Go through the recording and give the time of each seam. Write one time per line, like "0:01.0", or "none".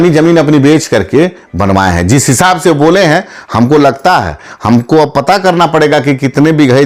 none